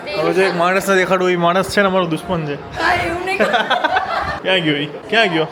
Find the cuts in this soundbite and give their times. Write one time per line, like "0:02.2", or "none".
none